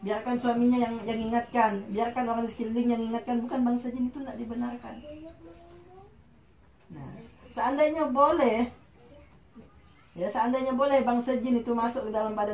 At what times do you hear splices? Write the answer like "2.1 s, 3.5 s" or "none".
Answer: none